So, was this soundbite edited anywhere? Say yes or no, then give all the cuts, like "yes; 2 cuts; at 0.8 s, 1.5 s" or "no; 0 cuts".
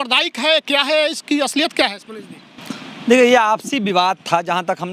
no; 0 cuts